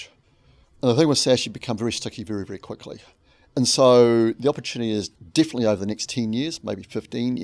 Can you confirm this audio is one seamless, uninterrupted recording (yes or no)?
no